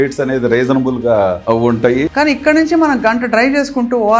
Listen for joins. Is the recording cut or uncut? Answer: cut